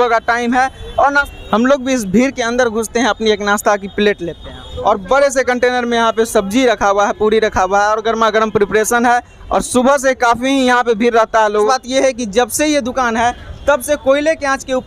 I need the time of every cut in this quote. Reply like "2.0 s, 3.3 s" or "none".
1.3 s, 4.7 s, 11.7 s

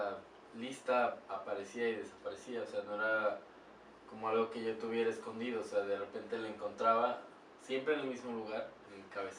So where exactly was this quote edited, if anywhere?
none

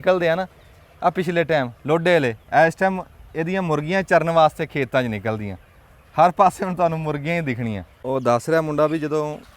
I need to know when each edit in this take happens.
7.9 s

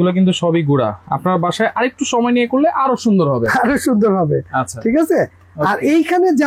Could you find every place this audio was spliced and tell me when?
none

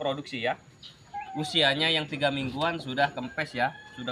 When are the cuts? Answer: 1.0 s

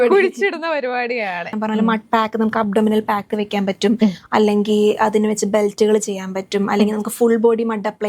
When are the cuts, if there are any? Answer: 1.5 s

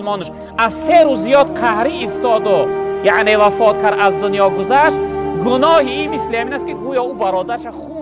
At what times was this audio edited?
none

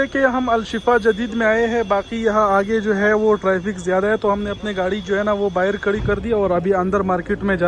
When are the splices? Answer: none

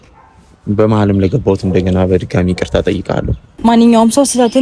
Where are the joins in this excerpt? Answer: 3.4 s

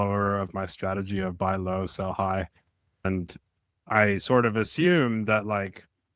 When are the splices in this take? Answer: 3.1 s

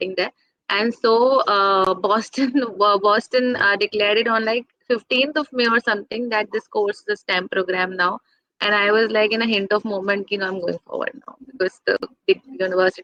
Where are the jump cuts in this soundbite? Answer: none

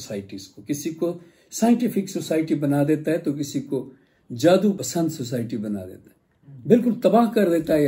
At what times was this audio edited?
4.8 s

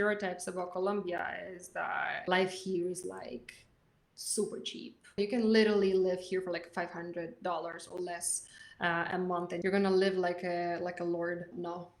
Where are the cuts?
2.2 s, 5.2 s, 9.6 s

